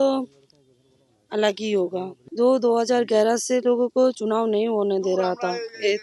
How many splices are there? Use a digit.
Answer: 1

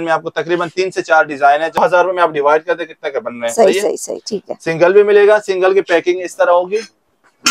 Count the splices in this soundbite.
1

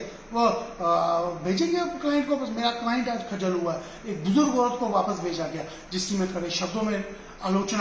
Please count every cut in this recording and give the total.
0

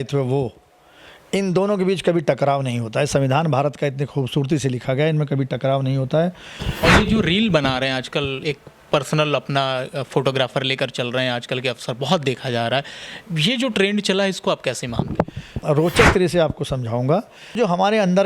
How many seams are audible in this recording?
3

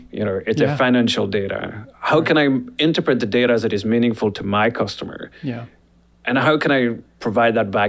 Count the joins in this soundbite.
0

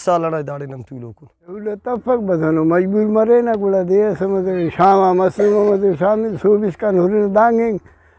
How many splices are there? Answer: 1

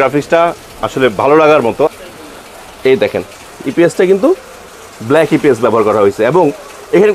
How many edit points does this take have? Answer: 1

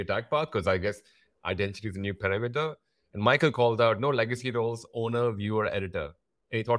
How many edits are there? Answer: 0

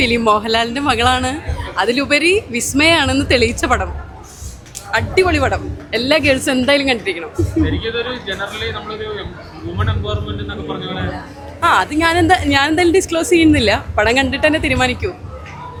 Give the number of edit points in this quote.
0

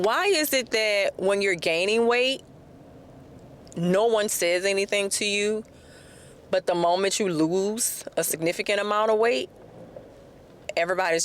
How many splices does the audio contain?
0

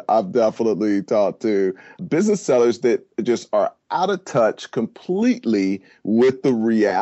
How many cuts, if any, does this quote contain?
0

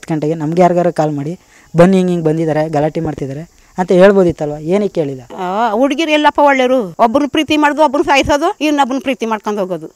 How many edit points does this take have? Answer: 3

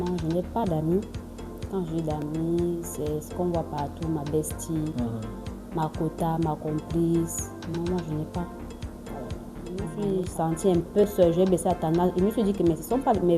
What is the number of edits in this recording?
1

